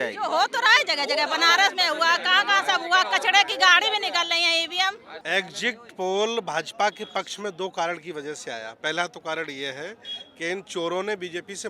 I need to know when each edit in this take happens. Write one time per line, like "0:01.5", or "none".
0:05.1

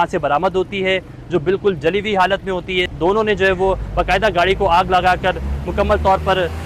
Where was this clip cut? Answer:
0:02.9

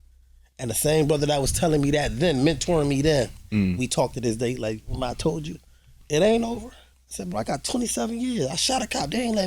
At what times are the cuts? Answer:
0:06.9

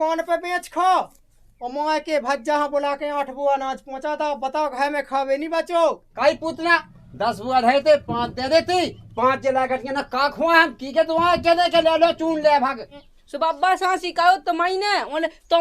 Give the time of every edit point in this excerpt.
0:06.1
0:13.1

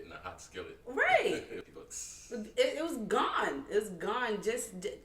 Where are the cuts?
0:01.6

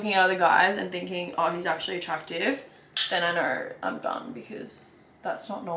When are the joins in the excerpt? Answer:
none

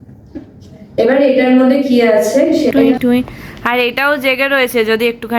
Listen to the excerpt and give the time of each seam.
0:02.7

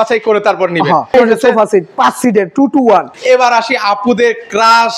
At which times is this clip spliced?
0:01.1
0:03.1

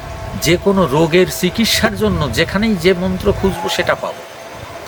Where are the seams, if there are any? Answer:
none

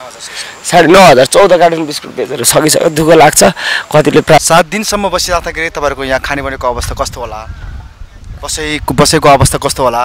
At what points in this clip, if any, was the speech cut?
0:04.4

